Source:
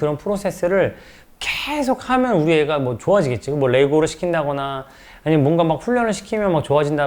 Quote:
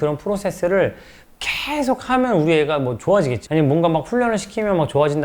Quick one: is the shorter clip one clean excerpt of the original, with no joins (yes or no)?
no